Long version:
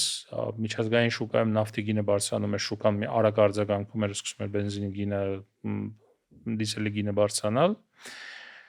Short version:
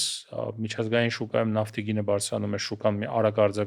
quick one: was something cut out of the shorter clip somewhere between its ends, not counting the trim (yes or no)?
no